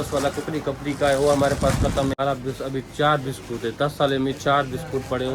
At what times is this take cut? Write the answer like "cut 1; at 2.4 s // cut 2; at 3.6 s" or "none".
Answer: cut 1; at 2.2 s